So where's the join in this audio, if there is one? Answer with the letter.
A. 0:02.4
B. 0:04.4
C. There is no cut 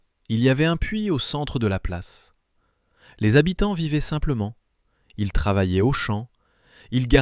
A